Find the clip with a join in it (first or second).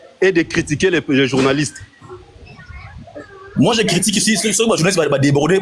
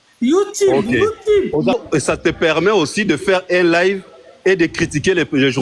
second